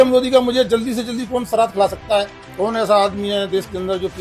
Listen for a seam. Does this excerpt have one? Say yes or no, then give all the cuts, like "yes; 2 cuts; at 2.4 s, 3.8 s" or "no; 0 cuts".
no; 0 cuts